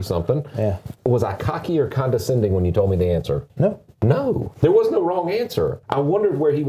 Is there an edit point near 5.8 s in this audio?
yes; 4 cuts; at 0.9 s, 3.5 s, 4.5 s, 5.8 s

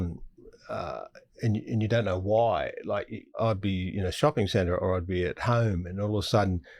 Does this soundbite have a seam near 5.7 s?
no; 1 cut; at 3.4 s

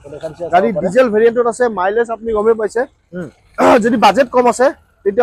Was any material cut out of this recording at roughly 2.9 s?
no; 0 cuts

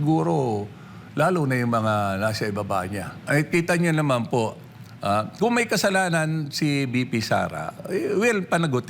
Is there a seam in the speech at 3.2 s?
yes; 1 cut; at 3.2 s

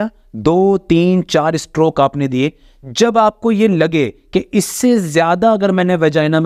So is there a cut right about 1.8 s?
no; 0 cuts

